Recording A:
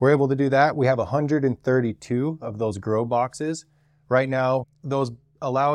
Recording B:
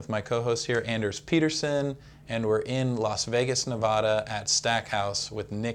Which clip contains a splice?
A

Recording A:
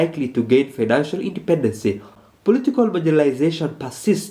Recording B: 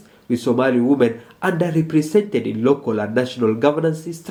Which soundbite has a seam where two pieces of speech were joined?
A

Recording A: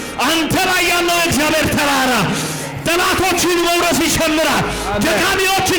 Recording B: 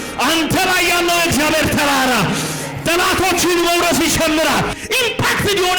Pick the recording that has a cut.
B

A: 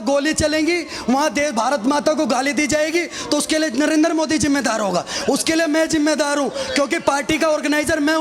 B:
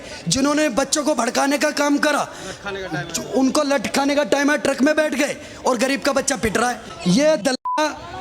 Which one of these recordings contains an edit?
B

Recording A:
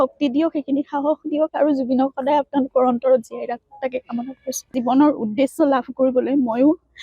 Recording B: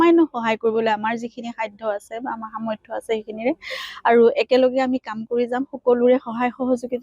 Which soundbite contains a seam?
A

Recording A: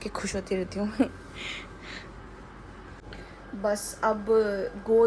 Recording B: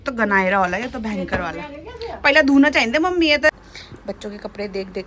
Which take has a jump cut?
B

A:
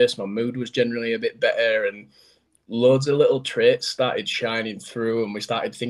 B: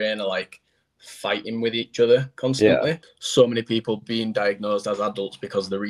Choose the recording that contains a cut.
B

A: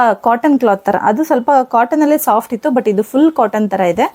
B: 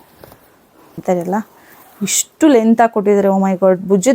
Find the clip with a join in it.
B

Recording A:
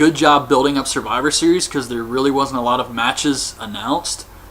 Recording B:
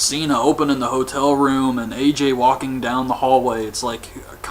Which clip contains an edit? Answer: A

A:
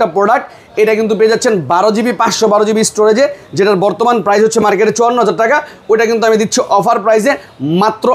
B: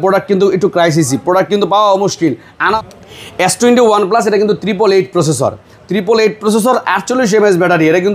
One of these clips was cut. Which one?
B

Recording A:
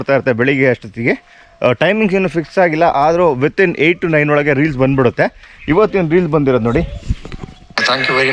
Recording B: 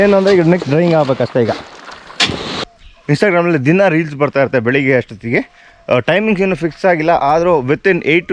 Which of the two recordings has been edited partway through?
B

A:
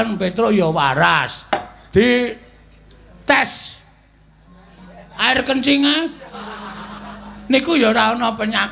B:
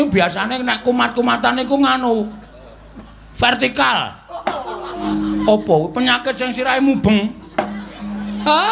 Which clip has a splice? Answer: B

